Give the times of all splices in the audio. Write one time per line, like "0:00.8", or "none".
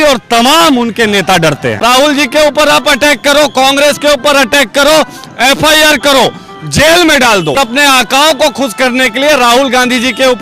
0:01.8
0:07.6

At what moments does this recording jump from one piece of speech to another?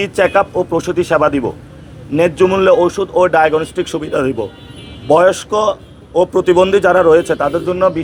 none

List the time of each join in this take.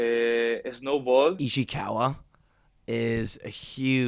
0:01.4

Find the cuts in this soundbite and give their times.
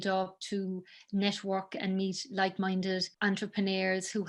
0:03.1

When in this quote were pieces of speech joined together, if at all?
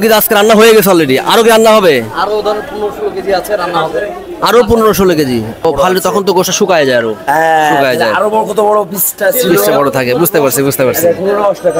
0:05.6

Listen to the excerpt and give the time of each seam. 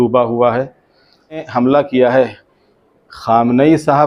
0:01.5

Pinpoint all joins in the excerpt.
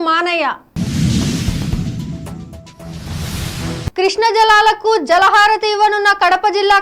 0:01.6
0:03.9

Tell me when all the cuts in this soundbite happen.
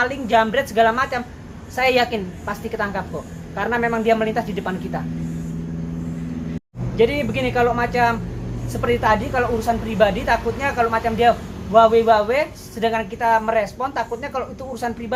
none

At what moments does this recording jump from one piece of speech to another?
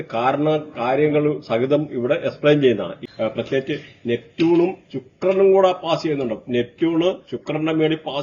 0:03.0

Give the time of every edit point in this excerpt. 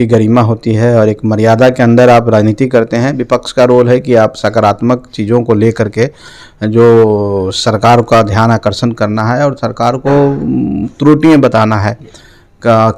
none

